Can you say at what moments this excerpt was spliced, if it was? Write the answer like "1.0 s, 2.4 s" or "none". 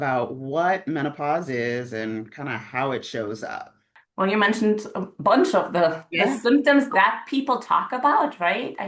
none